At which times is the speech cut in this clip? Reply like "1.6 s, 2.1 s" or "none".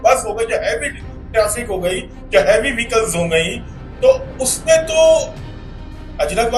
none